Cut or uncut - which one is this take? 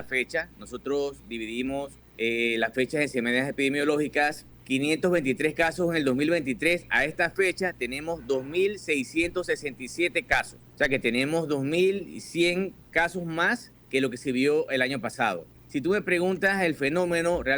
cut